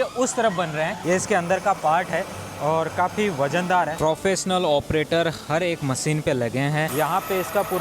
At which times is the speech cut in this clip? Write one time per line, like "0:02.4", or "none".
0:01.0
0:03.9
0:06.9